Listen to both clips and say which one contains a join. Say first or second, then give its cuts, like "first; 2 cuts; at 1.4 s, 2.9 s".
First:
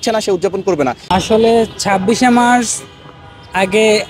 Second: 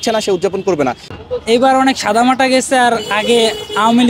second; 1 cut; at 1.0 s